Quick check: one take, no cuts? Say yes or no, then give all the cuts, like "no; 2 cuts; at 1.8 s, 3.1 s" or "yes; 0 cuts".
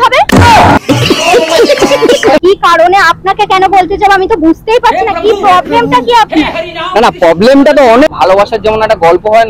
no; 2 cuts; at 2.4 s, 8.1 s